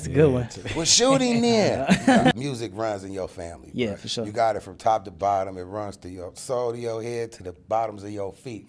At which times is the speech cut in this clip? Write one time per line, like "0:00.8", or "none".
0:02.3